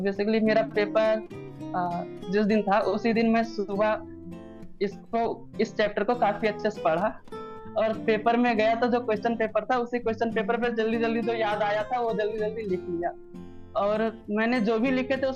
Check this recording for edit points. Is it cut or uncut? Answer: uncut